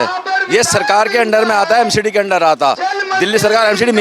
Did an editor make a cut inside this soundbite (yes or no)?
no